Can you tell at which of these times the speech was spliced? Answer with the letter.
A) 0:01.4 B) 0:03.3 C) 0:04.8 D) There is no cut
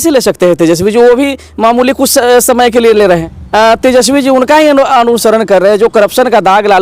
B